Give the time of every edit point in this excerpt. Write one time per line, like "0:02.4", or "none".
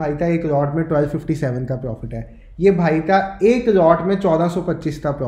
none